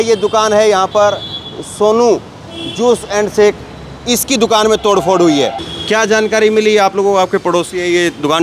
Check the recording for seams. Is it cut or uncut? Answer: cut